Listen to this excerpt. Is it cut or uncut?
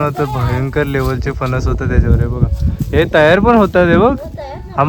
uncut